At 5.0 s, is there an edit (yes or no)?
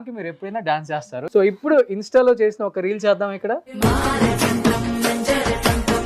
no